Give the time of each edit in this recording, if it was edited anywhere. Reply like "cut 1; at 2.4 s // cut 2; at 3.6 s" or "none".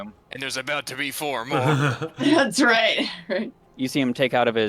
cut 1; at 3.6 s